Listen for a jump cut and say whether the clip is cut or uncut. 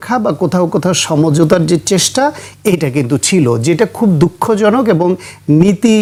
uncut